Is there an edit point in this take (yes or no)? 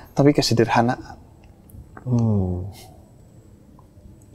no